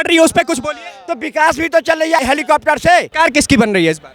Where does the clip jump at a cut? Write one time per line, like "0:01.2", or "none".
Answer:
0:02.2
0:03.1